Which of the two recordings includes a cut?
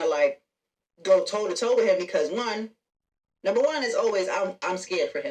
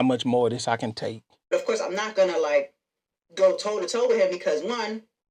second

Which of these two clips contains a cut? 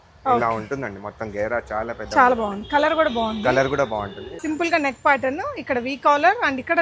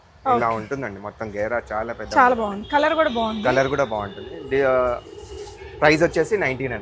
first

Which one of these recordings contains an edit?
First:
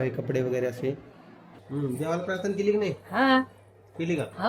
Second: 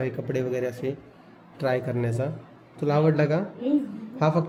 first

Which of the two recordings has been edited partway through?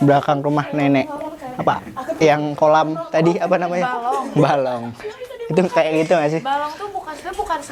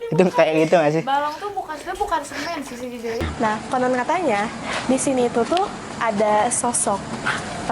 second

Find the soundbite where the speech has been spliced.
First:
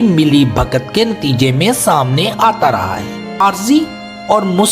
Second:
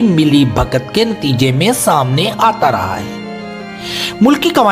first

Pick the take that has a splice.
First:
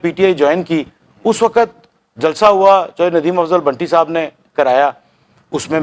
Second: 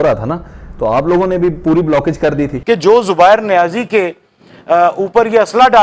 second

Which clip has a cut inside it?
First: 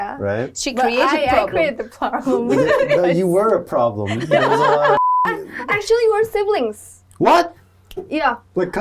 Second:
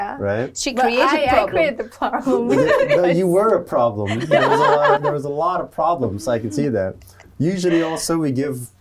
first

